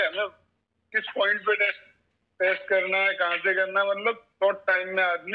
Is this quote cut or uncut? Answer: uncut